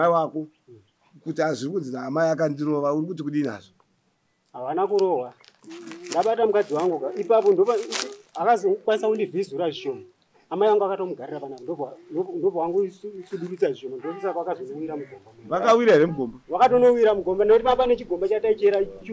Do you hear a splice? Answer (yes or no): no